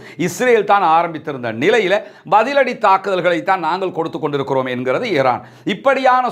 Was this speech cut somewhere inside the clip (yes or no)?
no